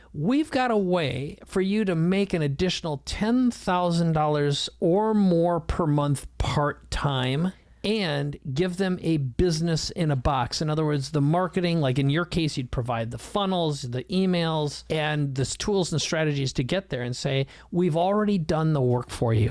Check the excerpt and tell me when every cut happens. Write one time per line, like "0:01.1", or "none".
0:07.7
0:14.8

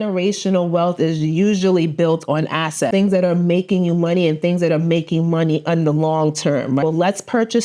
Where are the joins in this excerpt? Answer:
0:02.9
0:06.8

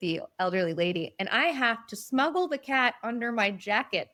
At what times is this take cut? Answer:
none

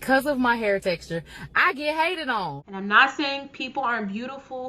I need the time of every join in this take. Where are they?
0:02.6

